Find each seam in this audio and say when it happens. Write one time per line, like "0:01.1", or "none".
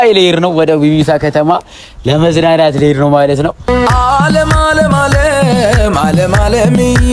0:03.6